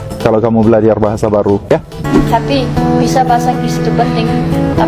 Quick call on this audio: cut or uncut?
cut